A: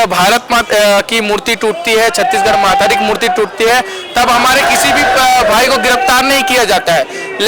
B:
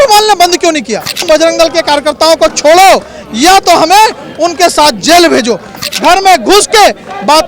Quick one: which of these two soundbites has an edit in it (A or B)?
B